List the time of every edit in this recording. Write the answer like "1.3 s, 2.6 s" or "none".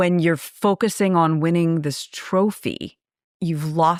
none